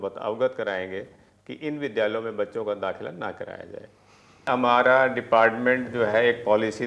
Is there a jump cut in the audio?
yes; 1 cut; at 4.4 s

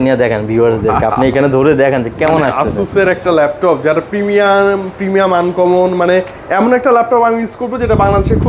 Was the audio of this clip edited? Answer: no; 0 cuts

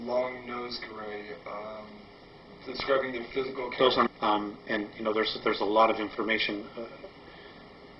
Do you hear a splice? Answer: no; 0 cuts

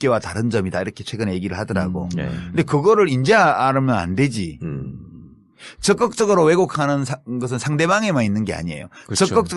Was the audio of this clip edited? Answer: no; 0 cuts

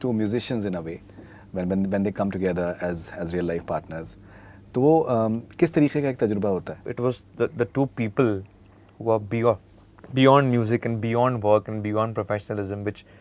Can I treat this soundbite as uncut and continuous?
no; 1 cut; at 6.8 s

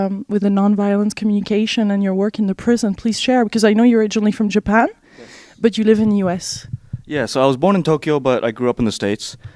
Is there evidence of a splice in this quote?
no; 0 cuts

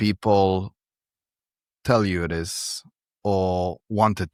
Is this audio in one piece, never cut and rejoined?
yes; 0 cuts

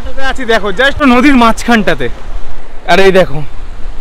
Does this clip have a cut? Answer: yes; 1 cut; at 1.0 s

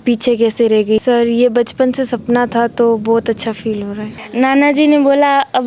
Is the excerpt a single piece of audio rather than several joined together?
no; 2 cuts; at 1.0 s, 4.1 s

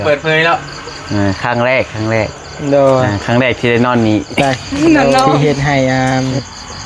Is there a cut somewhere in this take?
yes; 1 cut; at 5.4 s

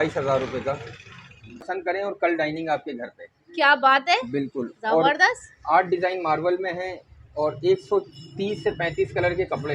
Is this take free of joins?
no; 1 cut; at 1.7 s

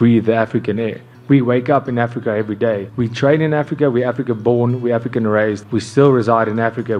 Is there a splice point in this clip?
no; 0 cuts

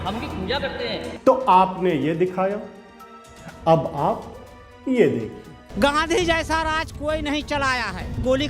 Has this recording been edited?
yes; 2 cuts; at 1.1 s, 5.6 s

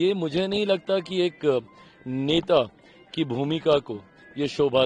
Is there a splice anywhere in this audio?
no; 0 cuts

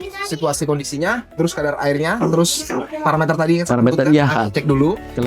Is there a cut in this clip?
no; 0 cuts

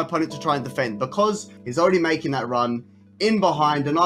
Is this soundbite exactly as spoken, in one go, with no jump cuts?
no; 1 cut; at 1.5 s

